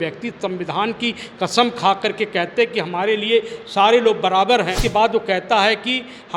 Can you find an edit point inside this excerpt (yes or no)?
yes